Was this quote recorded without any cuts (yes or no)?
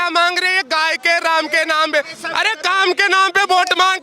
yes